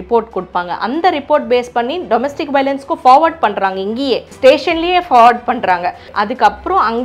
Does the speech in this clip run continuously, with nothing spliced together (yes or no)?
no